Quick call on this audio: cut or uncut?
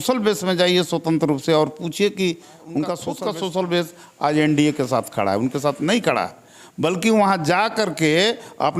cut